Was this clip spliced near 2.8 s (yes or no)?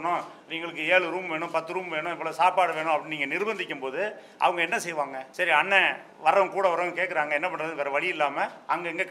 no